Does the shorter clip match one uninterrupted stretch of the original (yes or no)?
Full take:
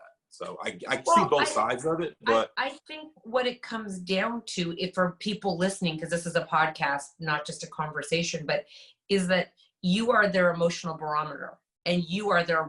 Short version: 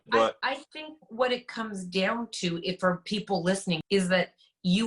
no